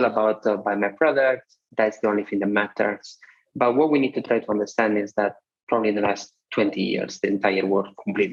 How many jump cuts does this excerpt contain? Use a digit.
0